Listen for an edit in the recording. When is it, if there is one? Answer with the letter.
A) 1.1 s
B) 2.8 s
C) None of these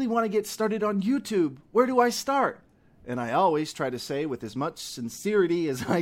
C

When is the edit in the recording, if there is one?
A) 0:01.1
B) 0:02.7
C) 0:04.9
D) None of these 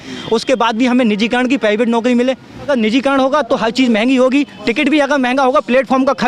B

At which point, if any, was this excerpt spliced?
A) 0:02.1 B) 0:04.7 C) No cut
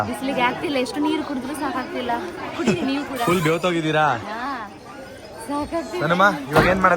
C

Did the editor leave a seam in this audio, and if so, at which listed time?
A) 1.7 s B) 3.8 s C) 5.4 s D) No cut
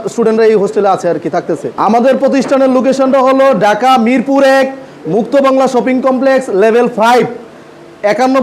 A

